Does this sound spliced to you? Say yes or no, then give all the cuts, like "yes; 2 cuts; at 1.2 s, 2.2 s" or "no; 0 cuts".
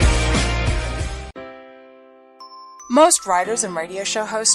yes; 1 cut; at 1.3 s